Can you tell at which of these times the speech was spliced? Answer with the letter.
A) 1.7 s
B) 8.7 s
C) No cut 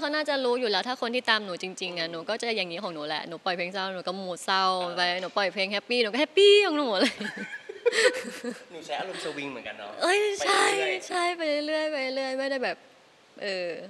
C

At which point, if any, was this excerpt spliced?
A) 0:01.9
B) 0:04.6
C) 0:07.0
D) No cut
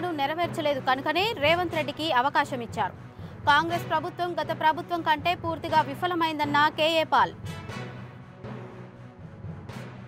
D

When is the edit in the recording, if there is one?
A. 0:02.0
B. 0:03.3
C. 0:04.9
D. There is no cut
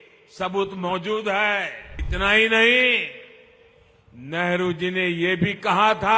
A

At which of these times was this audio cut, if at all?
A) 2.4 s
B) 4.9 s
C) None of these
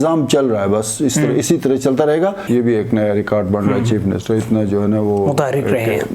A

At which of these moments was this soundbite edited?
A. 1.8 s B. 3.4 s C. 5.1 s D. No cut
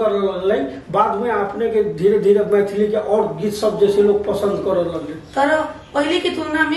D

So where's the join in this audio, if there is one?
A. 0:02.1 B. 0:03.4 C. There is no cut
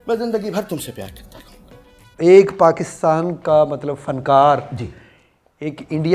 A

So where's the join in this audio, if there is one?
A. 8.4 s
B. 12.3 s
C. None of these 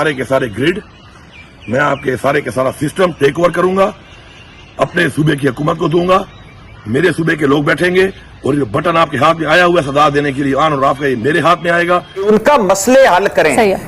B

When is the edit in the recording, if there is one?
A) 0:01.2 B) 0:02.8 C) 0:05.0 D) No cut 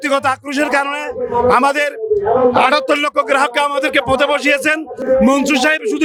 D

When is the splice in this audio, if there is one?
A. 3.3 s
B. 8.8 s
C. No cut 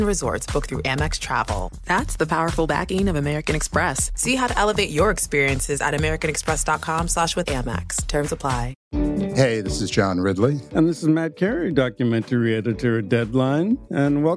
B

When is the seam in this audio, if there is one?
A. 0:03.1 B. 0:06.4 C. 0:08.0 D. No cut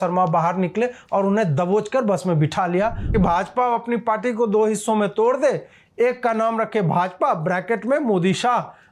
A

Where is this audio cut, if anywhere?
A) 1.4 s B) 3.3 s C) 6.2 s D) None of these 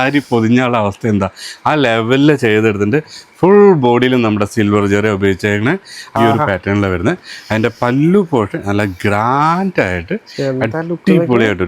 C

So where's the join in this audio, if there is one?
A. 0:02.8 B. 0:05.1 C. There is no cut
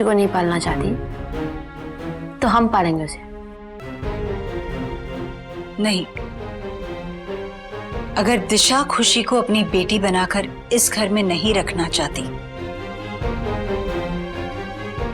B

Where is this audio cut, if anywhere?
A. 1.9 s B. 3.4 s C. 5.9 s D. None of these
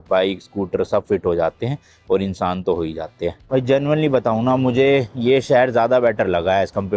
B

